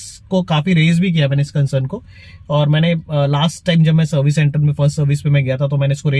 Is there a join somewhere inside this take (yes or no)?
no